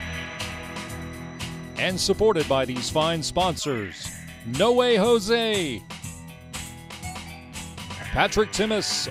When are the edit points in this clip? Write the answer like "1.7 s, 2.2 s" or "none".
none